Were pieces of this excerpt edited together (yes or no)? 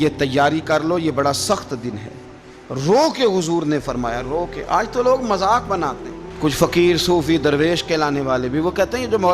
no